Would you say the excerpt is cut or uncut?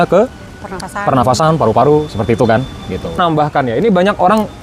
cut